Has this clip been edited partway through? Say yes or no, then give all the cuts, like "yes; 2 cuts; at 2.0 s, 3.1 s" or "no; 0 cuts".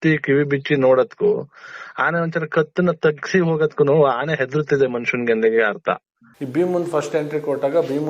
yes; 1 cut; at 6.1 s